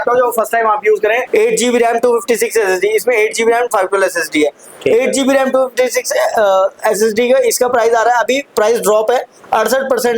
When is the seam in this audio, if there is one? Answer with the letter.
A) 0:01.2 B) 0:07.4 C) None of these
A